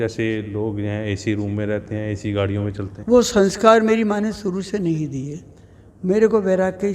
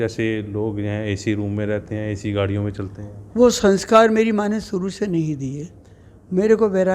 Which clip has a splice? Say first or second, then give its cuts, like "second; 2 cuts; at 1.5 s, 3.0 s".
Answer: first; 1 cut; at 2.9 s